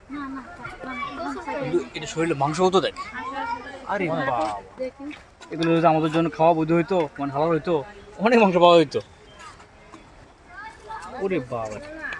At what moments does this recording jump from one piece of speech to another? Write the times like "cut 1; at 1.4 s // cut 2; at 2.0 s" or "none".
none